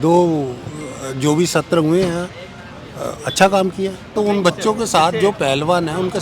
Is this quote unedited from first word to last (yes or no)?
no